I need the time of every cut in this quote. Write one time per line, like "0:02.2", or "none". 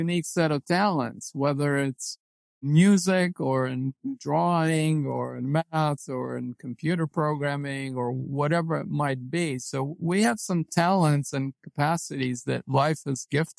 0:02.6